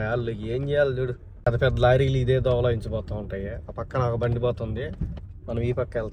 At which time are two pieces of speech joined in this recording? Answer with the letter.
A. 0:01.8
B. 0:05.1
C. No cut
C